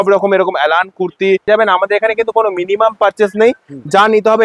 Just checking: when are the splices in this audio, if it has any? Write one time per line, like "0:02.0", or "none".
0:01.5